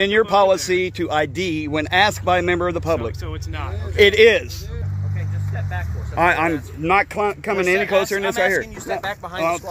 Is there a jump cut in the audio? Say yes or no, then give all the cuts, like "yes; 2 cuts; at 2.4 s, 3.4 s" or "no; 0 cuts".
yes; 1 cut; at 4.9 s